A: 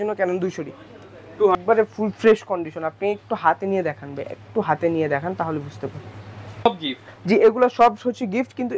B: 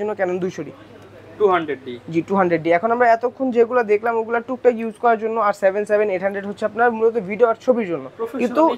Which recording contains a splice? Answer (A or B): A